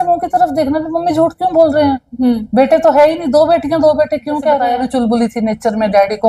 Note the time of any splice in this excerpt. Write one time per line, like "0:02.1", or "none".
0:04.5